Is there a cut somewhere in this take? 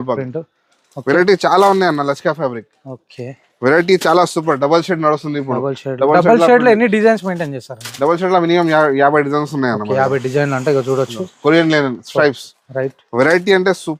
no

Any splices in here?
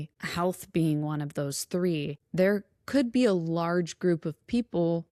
no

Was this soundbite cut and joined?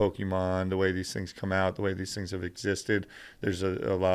no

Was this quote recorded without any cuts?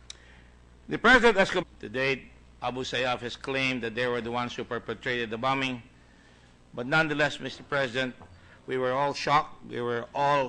yes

